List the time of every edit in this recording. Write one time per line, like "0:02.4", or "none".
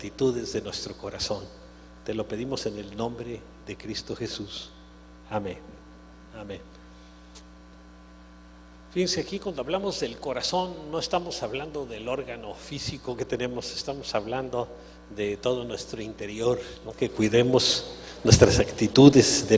none